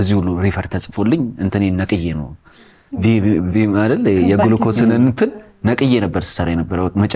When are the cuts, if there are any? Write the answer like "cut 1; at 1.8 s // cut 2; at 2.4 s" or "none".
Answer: none